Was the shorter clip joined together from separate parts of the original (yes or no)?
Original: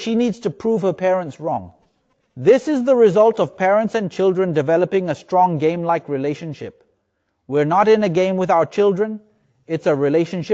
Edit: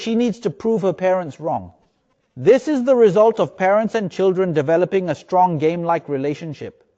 no